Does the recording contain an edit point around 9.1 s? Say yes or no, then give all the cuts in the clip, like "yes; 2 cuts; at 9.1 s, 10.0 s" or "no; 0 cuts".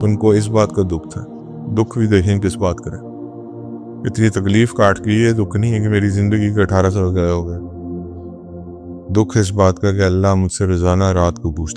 yes; 2 cuts; at 7.5 s, 9.1 s